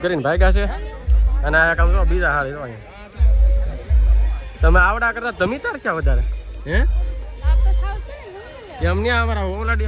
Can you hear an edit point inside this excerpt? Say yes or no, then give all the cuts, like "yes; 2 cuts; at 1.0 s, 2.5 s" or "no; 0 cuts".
no; 0 cuts